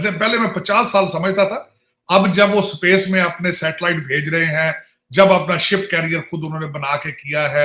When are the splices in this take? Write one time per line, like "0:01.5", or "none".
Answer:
none